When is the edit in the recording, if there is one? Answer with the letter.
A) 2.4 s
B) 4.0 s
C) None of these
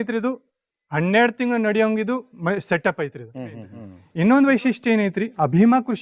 B